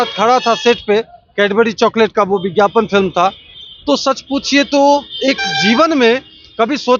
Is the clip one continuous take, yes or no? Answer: yes